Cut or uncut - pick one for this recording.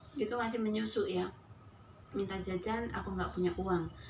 cut